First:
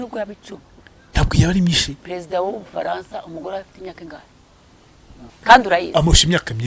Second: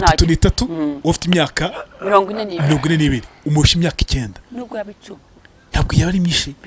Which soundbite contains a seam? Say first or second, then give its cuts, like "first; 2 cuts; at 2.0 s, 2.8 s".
first; 1 cut; at 5.3 s